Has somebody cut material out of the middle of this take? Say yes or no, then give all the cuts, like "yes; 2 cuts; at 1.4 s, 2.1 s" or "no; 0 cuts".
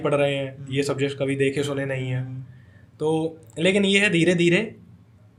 no; 0 cuts